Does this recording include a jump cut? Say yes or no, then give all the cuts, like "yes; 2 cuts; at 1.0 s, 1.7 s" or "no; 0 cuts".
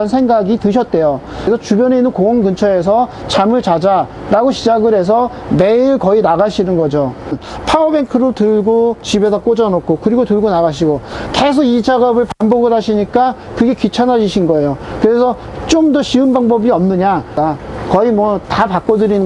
yes; 3 cuts; at 1.3 s, 7.3 s, 17.4 s